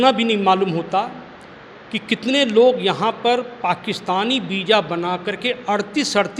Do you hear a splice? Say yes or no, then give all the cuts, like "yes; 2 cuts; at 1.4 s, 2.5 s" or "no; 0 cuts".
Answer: no; 0 cuts